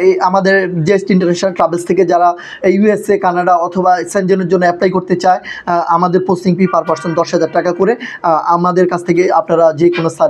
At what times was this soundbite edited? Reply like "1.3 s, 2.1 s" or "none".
none